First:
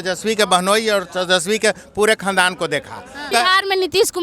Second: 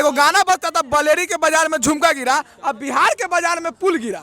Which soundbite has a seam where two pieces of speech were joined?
first; 1 cut; at 3.3 s

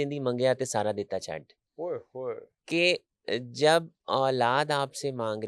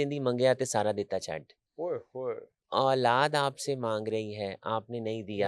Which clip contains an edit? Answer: second; 1 cut; at 2.6 s

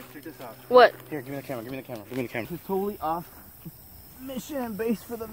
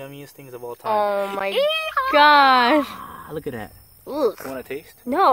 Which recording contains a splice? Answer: first; 1 cut; at 2.5 s

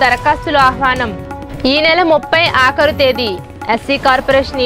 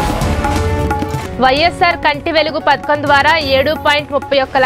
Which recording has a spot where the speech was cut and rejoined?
second; 1 cut; at 1.2 s

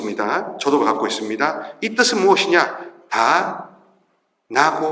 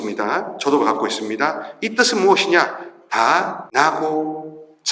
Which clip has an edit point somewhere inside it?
second; 1 cut; at 3.6 s

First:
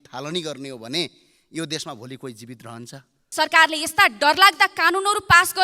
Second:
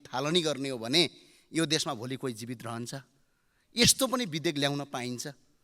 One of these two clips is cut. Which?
first; 1 cut; at 3.3 s

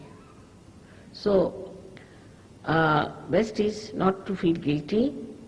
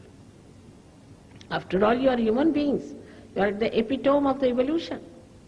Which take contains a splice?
first; 1 cut; at 4.4 s

